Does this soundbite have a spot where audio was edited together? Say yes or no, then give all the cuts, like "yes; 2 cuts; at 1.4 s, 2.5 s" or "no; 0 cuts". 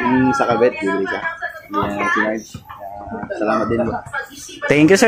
no; 0 cuts